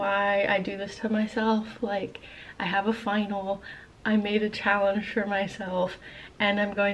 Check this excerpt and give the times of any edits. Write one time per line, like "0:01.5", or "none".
none